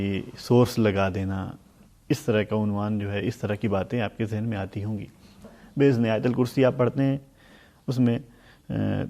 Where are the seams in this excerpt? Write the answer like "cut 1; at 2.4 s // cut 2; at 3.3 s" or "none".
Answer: cut 1; at 5.4 s